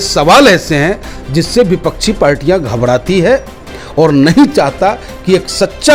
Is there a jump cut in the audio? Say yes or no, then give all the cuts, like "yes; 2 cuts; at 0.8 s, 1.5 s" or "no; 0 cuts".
no; 0 cuts